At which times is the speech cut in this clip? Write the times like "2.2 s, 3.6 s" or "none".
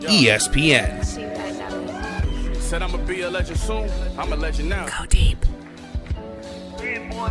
none

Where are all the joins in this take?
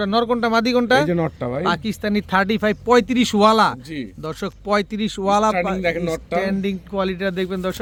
none

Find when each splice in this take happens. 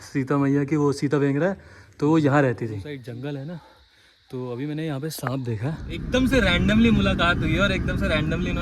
2.8 s, 5.9 s

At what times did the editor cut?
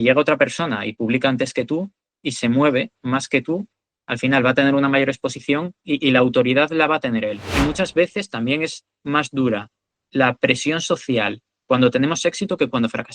7.5 s

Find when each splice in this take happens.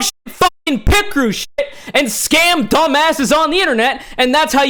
none

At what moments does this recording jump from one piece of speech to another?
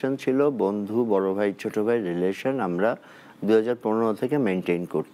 none

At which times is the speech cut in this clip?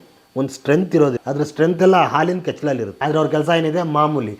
1.2 s, 2.9 s

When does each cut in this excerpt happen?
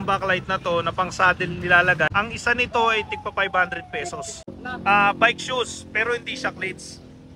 2.1 s, 4.5 s

